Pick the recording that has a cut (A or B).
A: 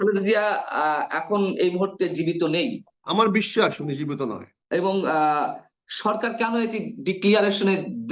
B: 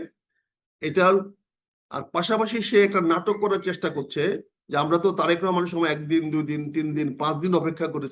A